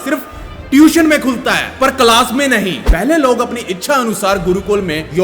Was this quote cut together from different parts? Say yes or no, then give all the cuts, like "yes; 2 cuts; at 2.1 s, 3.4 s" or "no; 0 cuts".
yes; 1 cut; at 2.8 s